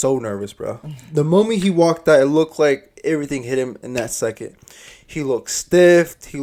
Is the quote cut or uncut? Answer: uncut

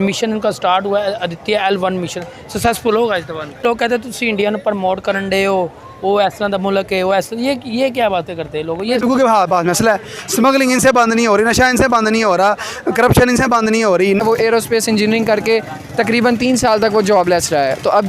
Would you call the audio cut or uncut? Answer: cut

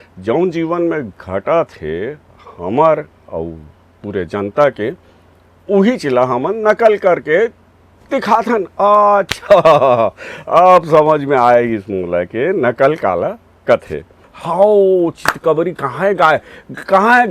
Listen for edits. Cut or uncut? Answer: cut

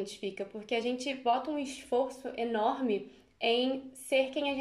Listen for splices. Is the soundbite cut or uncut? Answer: uncut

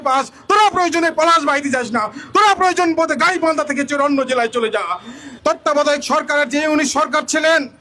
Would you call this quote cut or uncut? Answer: cut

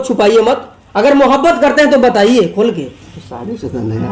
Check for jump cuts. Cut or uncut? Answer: uncut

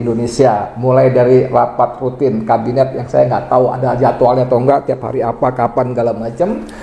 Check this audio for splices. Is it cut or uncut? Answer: uncut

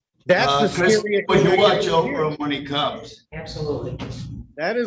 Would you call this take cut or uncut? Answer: uncut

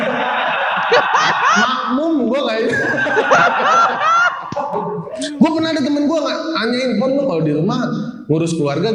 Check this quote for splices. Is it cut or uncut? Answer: uncut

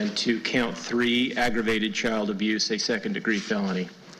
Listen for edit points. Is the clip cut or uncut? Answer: uncut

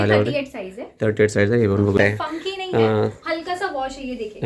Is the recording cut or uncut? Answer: cut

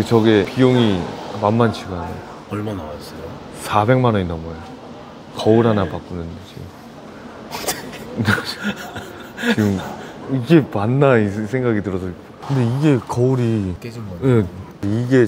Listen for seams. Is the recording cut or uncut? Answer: uncut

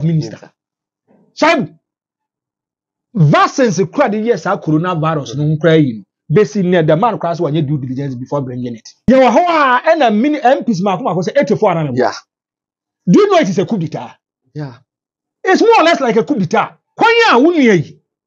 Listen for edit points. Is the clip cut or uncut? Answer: cut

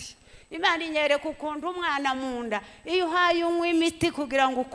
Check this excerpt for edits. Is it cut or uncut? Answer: uncut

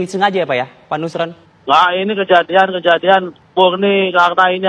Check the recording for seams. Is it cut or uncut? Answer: cut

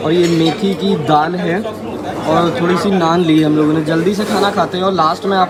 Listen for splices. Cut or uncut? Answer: uncut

